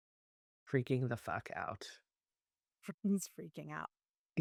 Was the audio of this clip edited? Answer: no; 0 cuts

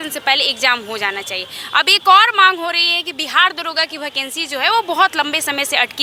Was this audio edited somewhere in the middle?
no; 0 cuts

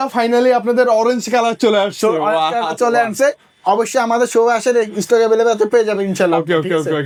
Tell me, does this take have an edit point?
no; 0 cuts

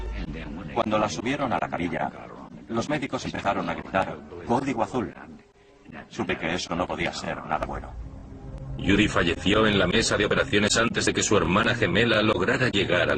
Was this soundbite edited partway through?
no; 0 cuts

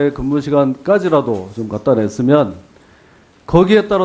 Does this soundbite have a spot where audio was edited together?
yes; 1 cut; at 2.1 s

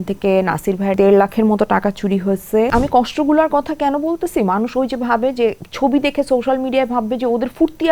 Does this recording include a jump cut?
yes; 2 cuts; at 1.0 s, 2.7 s

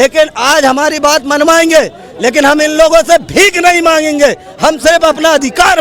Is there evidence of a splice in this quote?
no; 0 cuts

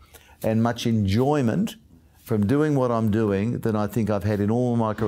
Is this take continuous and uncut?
yes; 0 cuts

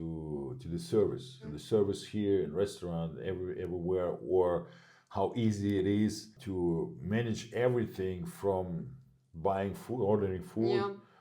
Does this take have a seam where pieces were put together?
yes; 1 cut; at 1.5 s

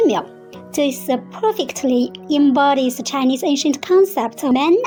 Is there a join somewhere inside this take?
no; 0 cuts

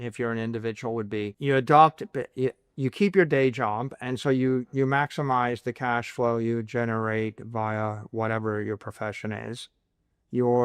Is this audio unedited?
no; 1 cut; at 1.3 s

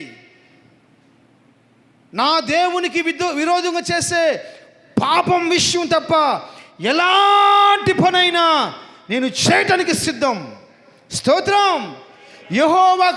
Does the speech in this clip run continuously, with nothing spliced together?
yes; 0 cuts

